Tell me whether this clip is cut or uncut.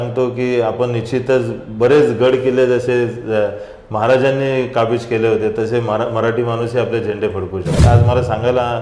cut